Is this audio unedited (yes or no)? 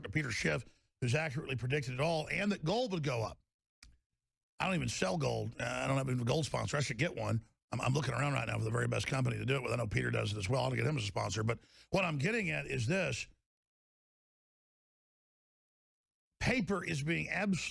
yes